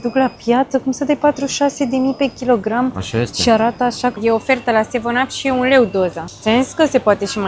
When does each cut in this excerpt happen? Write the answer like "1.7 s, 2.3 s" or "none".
4.2 s, 6.3 s